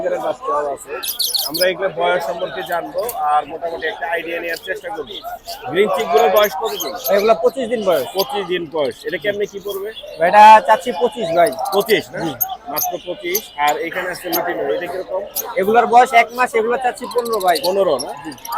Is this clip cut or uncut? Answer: uncut